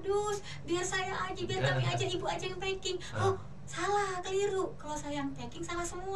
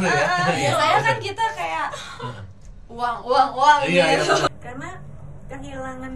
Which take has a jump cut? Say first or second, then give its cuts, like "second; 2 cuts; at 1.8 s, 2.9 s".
second; 1 cut; at 4.5 s